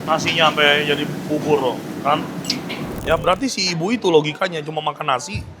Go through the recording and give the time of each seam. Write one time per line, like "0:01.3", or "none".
0:03.0